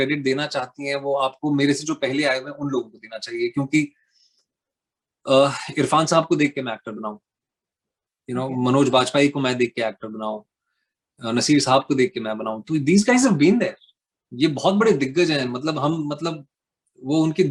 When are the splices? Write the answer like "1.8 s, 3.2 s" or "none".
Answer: none